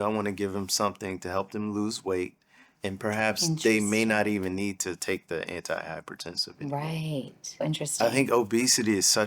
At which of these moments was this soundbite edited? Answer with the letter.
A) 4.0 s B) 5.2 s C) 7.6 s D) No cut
C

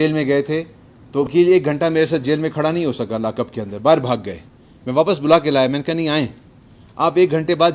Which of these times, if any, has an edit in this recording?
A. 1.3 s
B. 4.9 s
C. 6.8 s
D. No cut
A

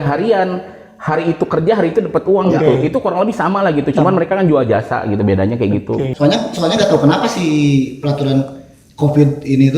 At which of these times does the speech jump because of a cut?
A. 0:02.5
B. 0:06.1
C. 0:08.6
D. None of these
B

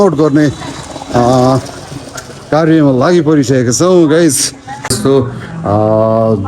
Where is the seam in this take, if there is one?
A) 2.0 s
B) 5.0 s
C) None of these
B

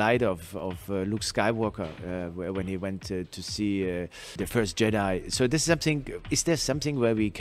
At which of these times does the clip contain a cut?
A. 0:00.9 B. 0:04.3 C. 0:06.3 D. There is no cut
B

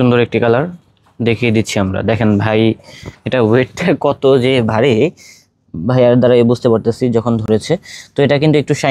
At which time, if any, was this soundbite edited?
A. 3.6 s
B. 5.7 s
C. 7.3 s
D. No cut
D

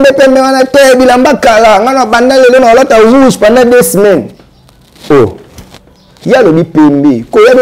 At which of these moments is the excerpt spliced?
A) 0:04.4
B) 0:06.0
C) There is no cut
C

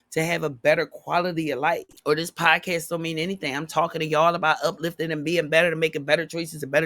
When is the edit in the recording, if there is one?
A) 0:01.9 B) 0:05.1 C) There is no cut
A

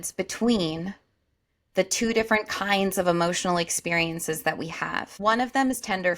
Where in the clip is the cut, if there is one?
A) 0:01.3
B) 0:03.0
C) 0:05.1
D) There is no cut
C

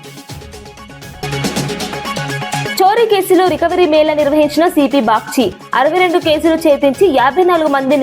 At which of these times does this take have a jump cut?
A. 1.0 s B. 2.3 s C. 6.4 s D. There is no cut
A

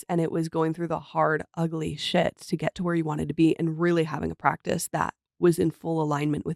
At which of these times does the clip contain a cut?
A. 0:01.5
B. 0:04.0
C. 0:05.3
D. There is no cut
D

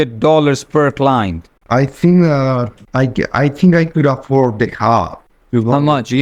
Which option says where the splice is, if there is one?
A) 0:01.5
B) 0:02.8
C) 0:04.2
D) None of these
A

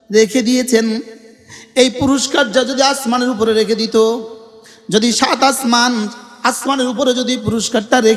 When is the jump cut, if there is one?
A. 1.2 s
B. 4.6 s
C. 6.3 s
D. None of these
D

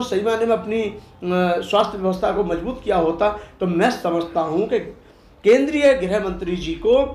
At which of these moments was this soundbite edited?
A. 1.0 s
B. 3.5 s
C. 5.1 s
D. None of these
D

